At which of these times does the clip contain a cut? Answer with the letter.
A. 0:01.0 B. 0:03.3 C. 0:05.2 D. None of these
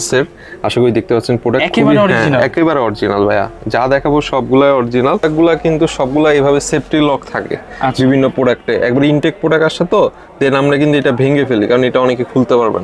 C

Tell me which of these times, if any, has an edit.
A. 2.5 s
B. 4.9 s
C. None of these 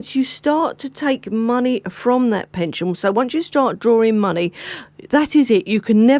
C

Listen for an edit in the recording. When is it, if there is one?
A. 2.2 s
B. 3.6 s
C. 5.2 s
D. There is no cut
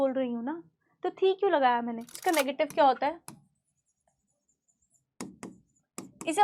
A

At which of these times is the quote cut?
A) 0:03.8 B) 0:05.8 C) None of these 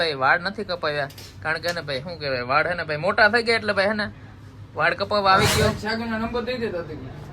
B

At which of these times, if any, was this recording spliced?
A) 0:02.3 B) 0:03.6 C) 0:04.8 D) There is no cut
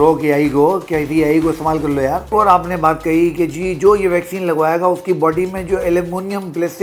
A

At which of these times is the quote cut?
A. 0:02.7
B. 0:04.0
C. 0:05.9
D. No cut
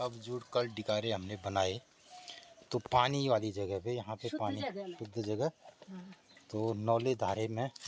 D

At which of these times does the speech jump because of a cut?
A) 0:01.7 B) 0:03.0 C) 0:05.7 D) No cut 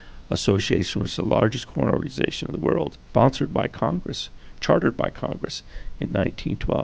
B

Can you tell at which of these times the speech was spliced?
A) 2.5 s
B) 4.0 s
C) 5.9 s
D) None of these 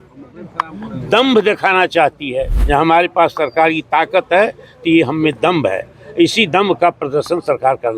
A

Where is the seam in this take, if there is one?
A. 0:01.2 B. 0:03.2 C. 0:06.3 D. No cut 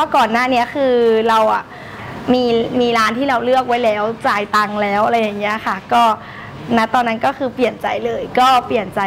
D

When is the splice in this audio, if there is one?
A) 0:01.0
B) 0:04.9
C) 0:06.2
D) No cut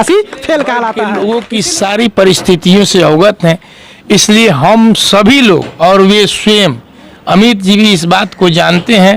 A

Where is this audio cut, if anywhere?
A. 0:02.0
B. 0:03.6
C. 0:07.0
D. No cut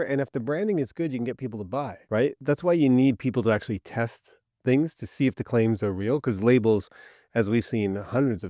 A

